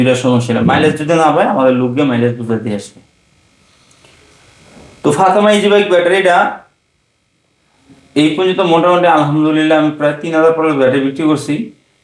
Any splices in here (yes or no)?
no